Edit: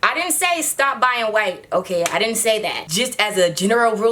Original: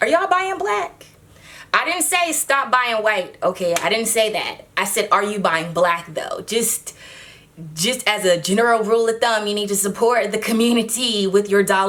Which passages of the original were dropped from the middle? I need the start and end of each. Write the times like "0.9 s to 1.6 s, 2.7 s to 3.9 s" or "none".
4.5 s to 7.7 s